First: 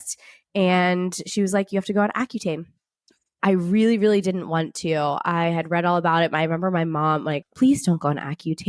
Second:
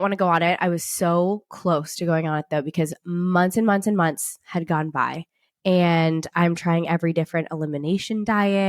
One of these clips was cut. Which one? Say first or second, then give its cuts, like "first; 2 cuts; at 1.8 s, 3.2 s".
first; 2 cuts; at 3.3 s, 7.5 s